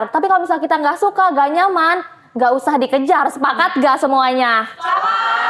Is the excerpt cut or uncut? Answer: uncut